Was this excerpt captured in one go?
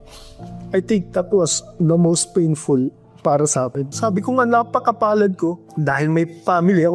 no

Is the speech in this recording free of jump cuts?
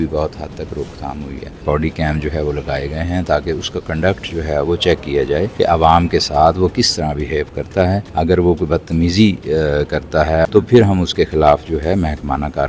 no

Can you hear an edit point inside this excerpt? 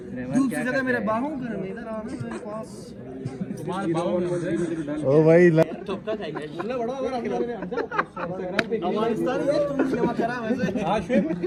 no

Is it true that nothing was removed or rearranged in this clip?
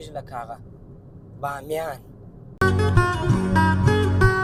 yes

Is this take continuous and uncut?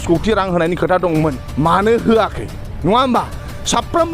no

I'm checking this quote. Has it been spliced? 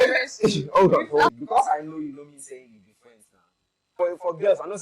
yes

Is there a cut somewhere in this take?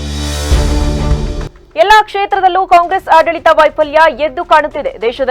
yes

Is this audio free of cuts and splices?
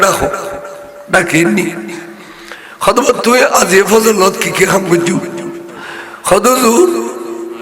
yes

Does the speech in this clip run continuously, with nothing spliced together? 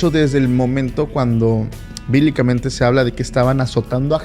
no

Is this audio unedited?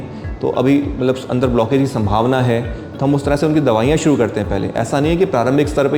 yes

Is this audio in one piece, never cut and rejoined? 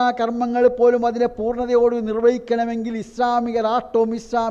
yes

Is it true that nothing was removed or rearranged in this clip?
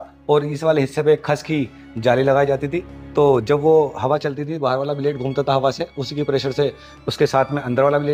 yes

